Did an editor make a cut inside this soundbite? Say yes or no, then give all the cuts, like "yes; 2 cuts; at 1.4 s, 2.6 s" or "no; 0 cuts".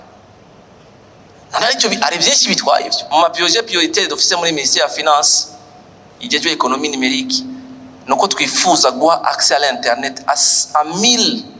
yes; 1 cut; at 3.0 s